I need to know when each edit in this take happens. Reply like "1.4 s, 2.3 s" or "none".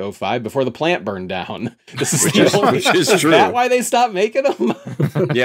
none

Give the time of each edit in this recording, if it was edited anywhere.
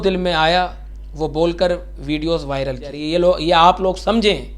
2.9 s

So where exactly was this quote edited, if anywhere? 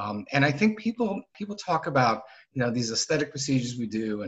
1.4 s

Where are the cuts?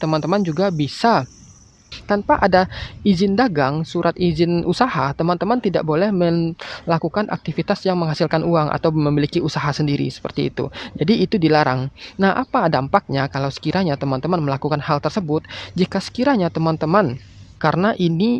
1.9 s, 17.5 s

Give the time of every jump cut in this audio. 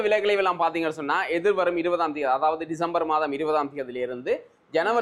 none

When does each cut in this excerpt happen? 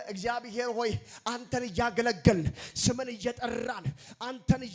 none

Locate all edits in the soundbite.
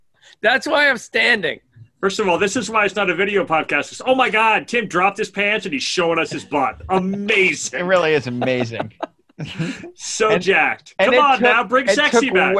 none

